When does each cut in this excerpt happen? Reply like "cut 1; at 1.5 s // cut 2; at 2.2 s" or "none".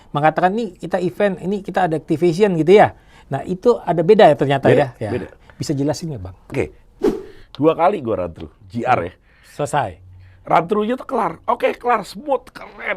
cut 1; at 6.9 s